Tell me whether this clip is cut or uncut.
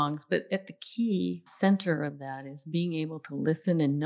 cut